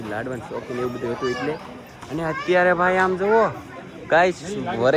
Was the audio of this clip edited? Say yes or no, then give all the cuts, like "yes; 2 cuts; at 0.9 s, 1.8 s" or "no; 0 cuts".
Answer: no; 0 cuts